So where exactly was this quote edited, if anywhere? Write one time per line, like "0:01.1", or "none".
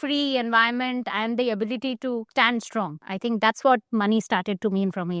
0:02.7